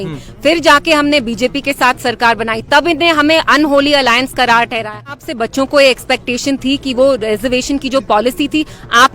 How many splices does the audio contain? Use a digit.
1